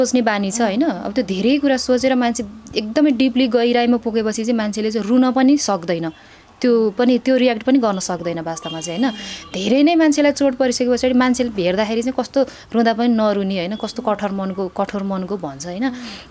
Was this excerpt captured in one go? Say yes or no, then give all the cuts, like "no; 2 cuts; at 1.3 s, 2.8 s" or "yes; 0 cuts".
yes; 0 cuts